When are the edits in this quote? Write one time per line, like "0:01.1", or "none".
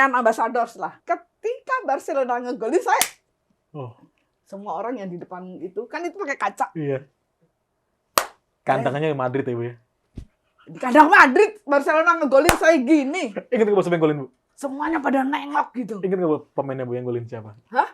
0:01.0

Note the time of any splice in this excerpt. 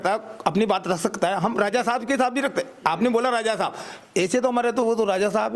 none

